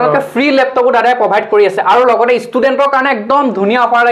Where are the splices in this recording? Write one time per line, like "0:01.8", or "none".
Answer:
none